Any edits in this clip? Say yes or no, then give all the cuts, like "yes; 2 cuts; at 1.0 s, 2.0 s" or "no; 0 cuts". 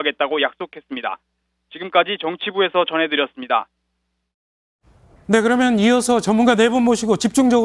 yes; 1 cut; at 2.1 s